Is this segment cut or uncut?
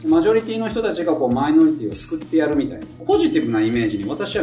cut